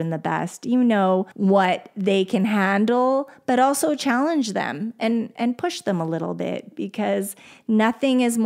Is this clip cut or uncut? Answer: cut